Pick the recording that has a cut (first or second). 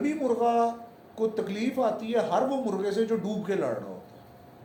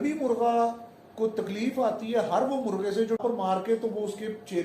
second